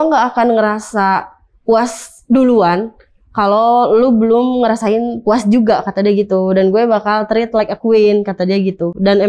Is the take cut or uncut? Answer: uncut